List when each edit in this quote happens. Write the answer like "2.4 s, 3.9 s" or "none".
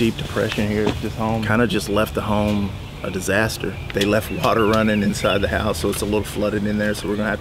1.4 s, 3.8 s